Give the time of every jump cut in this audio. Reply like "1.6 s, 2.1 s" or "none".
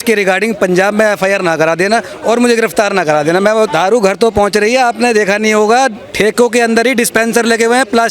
3.7 s